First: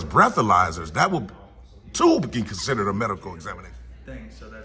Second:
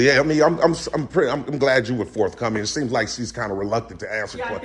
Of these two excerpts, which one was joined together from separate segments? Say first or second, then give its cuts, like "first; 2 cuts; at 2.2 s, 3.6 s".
first; 1 cut; at 3.4 s